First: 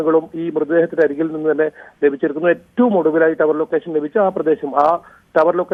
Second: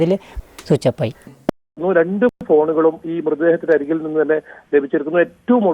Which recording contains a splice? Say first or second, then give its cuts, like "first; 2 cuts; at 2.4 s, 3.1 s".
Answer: second; 1 cut; at 1.6 s